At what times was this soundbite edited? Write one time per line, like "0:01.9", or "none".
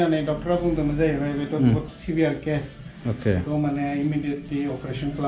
none